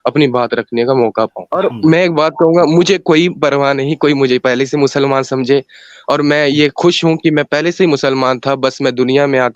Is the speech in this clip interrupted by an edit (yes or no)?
yes